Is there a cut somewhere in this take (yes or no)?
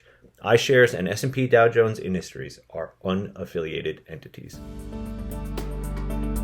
yes